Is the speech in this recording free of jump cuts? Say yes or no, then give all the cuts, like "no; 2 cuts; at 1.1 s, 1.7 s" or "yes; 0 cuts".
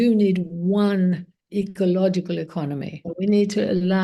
no; 1 cut; at 3.0 s